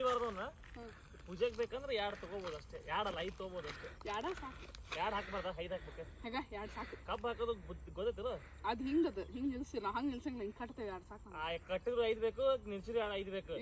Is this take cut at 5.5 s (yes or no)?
no